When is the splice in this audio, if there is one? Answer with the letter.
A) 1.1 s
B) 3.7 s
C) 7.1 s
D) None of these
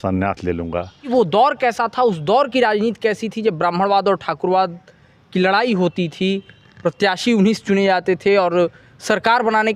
A